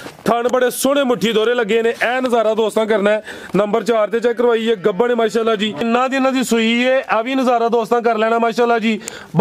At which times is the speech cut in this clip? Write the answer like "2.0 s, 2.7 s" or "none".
5.8 s